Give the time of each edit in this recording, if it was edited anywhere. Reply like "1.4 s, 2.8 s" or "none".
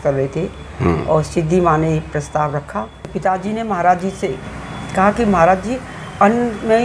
3.0 s